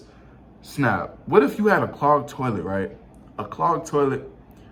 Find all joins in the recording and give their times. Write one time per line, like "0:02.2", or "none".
none